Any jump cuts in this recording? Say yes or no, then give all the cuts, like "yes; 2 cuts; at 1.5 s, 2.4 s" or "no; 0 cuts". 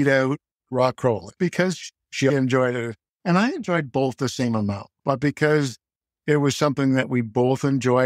yes; 1 cut; at 4.9 s